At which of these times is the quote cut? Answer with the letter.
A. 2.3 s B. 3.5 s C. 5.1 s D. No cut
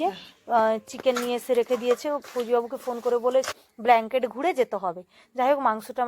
B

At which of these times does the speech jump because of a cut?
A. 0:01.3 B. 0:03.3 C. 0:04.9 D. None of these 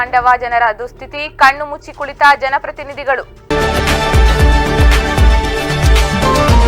B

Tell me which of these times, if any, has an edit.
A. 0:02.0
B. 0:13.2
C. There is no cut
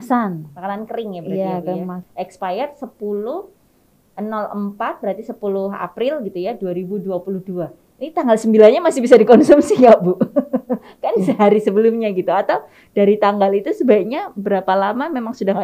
A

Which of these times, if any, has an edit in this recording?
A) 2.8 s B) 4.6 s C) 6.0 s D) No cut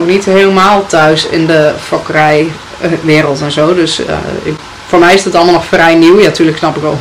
D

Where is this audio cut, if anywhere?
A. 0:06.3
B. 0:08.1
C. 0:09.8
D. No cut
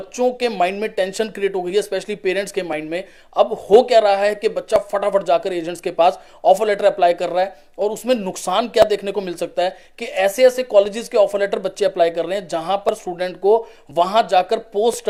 D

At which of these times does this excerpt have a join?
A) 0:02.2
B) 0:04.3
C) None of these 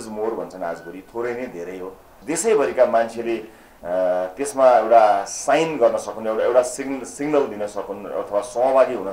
A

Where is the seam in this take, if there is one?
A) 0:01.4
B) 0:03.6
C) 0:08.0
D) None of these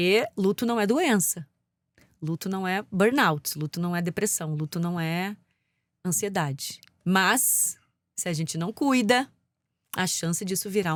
D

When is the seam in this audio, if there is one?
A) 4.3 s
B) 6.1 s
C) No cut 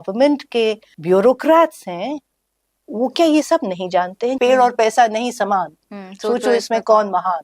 A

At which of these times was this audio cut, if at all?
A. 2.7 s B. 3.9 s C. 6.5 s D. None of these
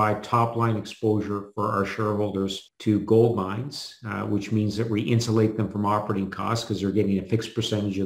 A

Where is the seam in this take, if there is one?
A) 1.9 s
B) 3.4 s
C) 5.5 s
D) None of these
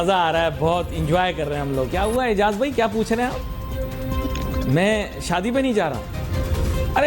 A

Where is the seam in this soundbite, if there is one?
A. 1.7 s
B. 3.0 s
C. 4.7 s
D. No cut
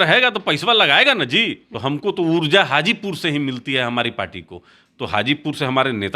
A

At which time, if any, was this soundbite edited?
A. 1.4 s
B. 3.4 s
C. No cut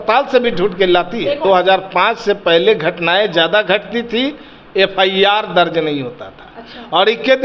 A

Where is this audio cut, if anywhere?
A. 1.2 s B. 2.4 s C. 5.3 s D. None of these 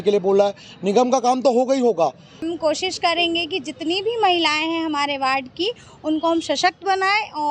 B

